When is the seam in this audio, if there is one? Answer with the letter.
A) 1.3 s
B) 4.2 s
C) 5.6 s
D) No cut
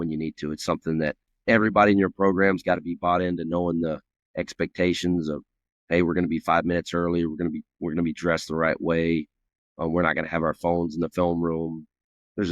A